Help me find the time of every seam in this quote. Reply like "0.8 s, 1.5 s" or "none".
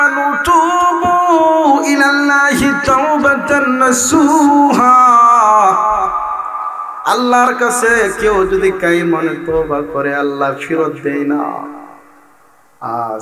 none

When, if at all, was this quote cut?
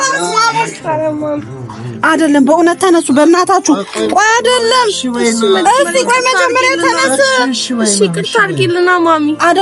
none

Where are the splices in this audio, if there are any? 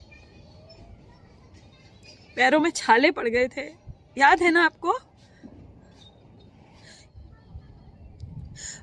7.1 s

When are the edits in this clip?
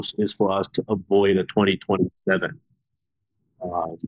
none

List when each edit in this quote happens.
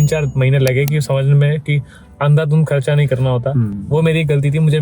none

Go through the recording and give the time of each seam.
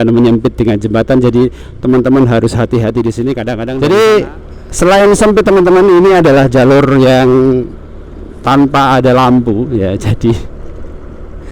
3.7 s

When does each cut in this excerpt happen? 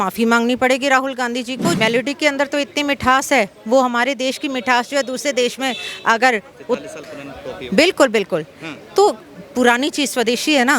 1.8 s

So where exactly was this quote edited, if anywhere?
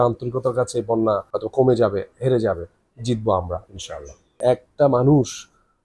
1.4 s, 4.4 s

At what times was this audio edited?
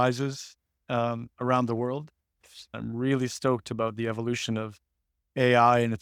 2.6 s

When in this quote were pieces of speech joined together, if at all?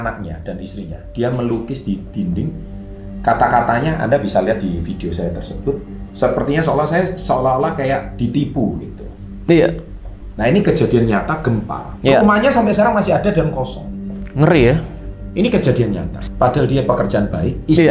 16.1 s

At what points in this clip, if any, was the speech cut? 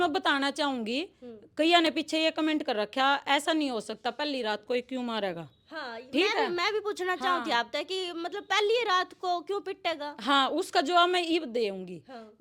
none

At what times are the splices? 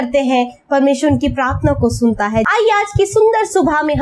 2.5 s

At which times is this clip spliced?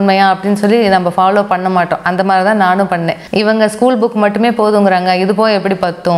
none

